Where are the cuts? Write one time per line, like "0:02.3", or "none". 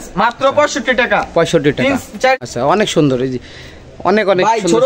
0:02.4